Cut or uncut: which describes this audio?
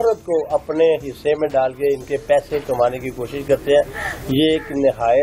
uncut